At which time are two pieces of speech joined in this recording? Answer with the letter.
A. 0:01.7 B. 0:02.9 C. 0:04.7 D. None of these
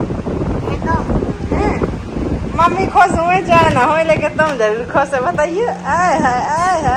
D